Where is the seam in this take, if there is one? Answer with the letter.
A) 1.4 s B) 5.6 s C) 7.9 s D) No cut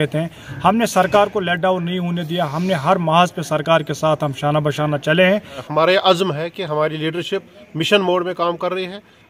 B